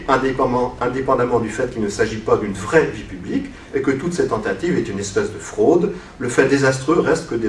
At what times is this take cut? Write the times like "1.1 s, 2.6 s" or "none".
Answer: 5.2 s